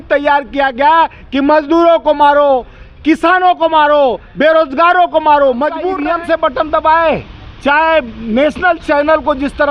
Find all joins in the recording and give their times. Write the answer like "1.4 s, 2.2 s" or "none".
5.9 s

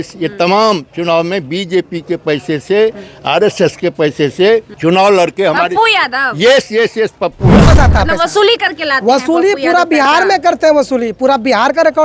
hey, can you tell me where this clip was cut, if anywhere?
4.7 s, 7.7 s

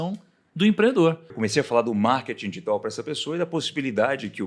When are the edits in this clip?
1.3 s

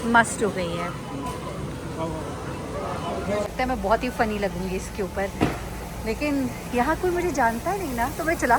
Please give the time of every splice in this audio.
3.5 s

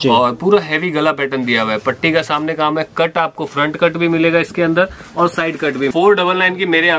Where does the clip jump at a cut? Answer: 5.9 s

